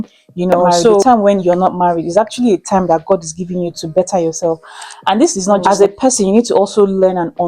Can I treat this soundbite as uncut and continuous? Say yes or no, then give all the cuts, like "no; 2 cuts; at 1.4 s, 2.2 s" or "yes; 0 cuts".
no; 2 cuts; at 1.0 s, 5.6 s